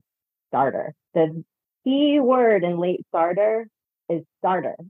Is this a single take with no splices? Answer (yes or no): no